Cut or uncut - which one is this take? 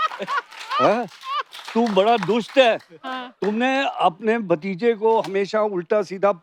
uncut